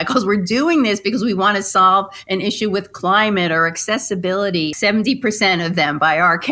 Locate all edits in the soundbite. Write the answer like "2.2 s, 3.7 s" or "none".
4.7 s